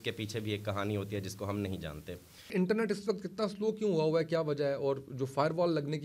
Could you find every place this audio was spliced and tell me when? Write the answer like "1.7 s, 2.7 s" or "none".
2.5 s